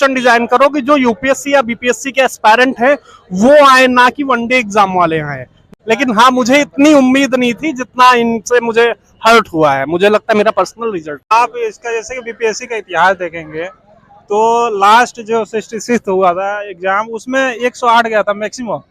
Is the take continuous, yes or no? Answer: no